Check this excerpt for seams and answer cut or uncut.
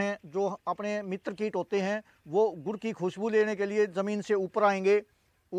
uncut